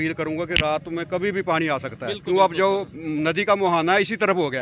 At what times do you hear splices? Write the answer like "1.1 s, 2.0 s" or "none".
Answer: none